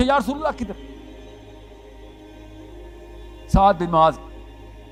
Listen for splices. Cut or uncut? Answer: uncut